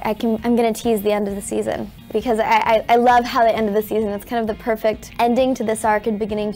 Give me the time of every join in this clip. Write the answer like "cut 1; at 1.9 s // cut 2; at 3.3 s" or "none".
cut 1; at 2.0 s // cut 2; at 5.1 s